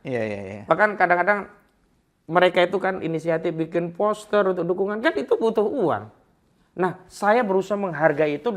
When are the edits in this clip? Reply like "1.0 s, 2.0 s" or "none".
none